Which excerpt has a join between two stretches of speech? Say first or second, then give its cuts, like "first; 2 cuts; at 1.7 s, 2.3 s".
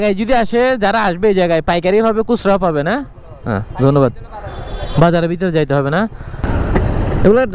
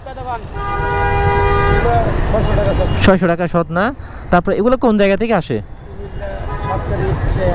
first; 1 cut; at 6.4 s